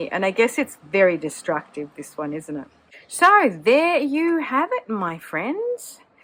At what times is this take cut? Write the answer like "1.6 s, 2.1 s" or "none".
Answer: none